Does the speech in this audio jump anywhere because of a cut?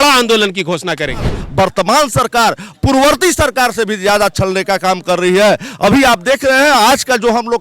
yes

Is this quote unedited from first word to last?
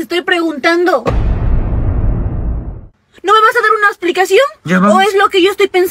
no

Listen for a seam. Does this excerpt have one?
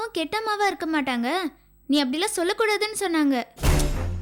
no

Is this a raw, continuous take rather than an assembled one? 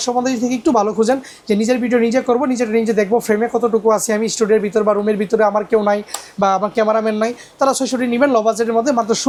yes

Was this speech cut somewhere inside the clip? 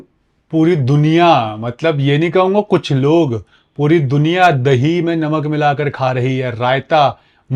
no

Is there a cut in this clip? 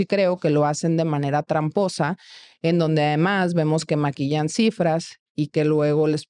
no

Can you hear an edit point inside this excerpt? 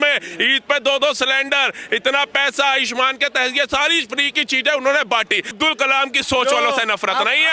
yes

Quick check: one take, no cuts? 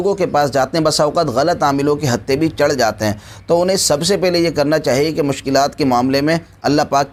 yes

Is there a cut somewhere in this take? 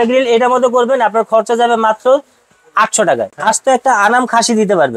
yes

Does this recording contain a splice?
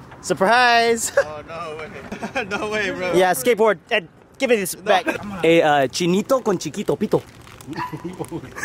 yes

